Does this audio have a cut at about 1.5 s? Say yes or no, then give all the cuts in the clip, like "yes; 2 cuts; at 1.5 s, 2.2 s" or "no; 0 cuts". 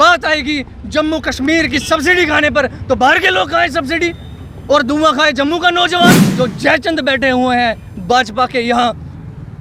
no; 1 cut; at 6.2 s